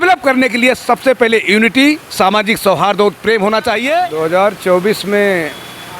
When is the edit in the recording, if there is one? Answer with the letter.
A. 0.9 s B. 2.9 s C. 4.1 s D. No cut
C